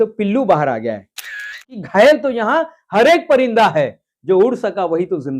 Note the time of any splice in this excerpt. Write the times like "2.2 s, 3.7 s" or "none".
1.6 s